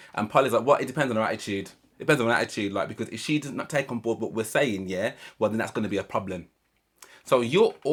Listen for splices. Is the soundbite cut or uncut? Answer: uncut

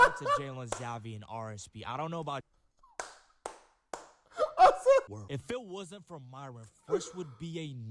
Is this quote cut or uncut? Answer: cut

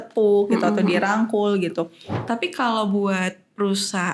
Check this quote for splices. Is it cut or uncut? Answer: cut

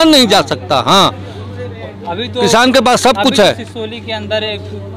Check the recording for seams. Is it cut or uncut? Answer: uncut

